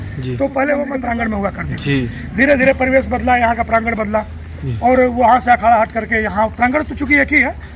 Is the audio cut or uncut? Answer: cut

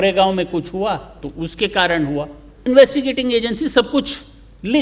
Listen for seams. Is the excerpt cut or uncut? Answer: cut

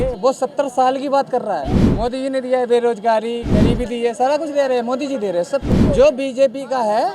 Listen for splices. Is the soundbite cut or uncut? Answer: cut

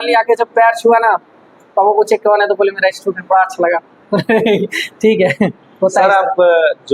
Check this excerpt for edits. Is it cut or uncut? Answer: uncut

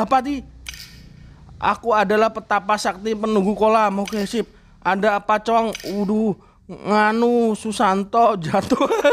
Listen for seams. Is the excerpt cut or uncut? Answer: uncut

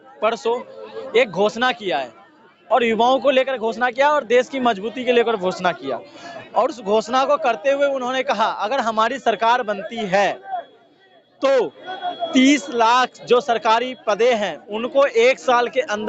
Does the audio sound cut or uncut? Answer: uncut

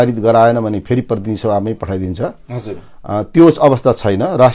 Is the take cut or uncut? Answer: uncut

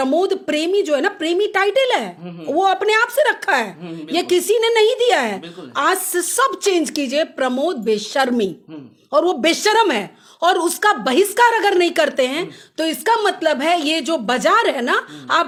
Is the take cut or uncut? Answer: uncut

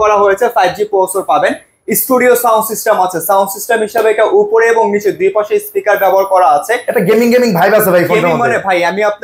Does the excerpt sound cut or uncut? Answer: uncut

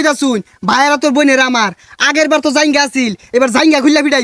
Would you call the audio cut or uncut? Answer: uncut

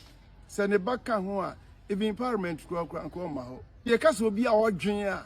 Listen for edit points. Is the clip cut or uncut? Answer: cut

